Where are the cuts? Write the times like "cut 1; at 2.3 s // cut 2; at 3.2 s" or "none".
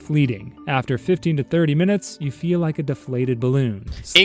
none